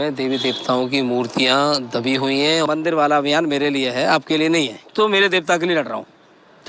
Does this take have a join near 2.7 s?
yes; 2 cuts; at 2.7 s, 4.9 s

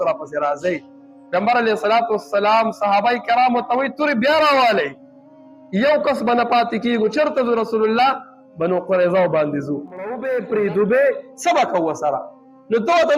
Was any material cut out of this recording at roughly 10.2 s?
yes; 1 cut; at 10.2 s

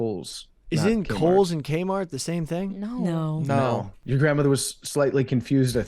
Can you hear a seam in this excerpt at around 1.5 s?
no; 1 cut; at 3.9 s

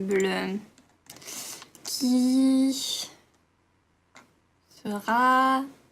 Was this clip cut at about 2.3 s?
yes; 1 cut; at 2.3 s

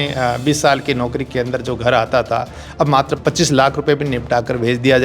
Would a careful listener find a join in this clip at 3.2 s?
yes; 1 cut; at 3.2 s

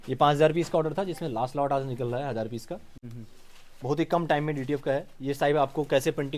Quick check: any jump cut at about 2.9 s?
yes; 1 cut; at 2.9 s

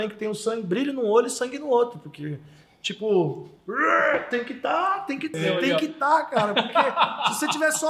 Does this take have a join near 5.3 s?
yes; 1 cut; at 5.3 s

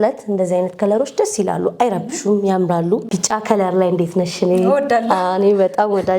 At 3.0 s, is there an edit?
yes; 1 cut; at 3.0 s

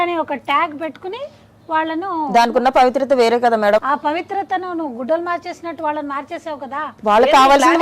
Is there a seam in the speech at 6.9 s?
yes; 2 cuts; at 3.8 s, 6.9 s

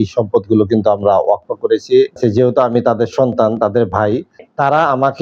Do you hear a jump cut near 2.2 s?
yes; 1 cut; at 2.2 s

